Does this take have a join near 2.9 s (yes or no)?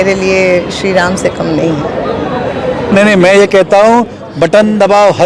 yes